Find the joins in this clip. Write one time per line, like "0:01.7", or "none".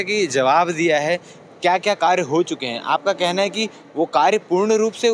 none